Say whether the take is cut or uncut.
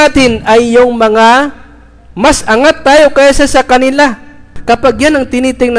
cut